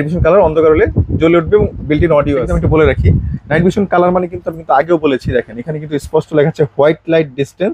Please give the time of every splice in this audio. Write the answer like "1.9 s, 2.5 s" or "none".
2.5 s

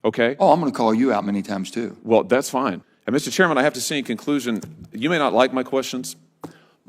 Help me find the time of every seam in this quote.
2.9 s

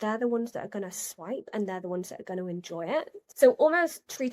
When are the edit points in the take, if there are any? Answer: 3.2 s

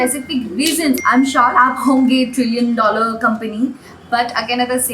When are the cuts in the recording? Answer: 1.0 s

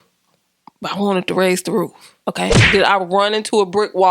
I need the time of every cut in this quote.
2.6 s

